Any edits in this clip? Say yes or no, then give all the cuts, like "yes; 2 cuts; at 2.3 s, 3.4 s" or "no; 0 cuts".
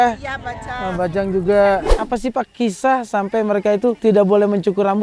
yes; 2 cuts; at 1.9 s, 4.0 s